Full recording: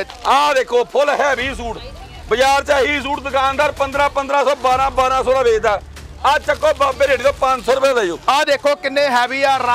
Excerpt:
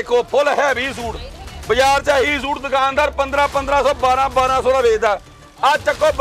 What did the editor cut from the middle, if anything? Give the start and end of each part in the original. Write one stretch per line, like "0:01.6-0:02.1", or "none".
none

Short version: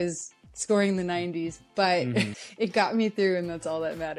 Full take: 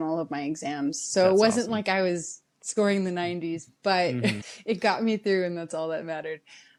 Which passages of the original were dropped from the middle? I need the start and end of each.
none

